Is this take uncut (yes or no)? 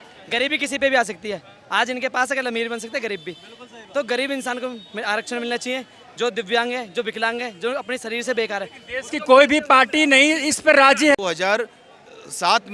no